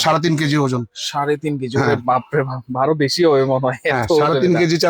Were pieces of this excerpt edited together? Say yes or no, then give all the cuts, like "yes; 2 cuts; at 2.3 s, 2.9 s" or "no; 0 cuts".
no; 0 cuts